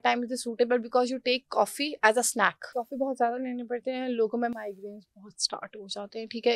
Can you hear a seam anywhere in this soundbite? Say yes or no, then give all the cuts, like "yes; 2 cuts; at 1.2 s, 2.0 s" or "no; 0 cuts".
yes; 1 cut; at 2.7 s